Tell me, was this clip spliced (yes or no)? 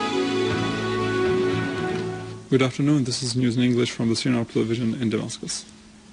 no